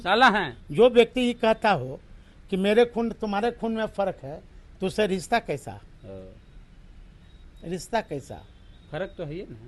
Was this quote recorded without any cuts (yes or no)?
yes